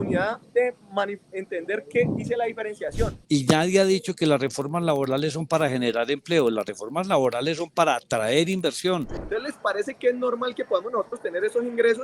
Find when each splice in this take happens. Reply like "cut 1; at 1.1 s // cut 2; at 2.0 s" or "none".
cut 1; at 3.1 s // cut 2; at 9.2 s